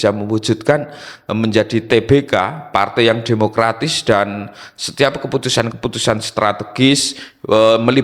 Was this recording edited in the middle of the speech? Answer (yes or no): no